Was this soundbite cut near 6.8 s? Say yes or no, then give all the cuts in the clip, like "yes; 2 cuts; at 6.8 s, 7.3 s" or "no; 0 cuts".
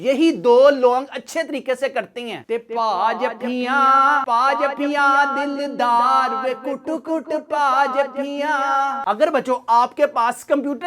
no; 1 cut; at 9.0 s